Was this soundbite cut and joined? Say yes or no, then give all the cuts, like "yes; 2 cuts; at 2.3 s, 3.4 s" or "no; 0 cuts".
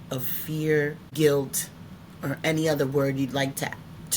yes; 1 cut; at 1.0 s